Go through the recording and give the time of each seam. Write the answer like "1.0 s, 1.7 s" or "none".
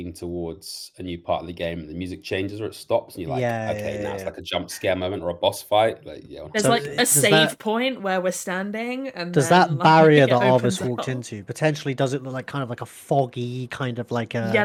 none